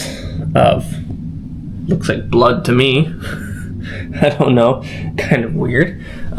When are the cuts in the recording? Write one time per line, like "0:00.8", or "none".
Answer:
none